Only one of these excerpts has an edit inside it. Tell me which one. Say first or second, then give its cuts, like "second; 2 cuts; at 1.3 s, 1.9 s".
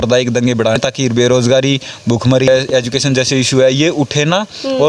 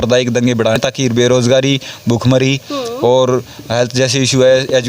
first; 1 cut; at 2.5 s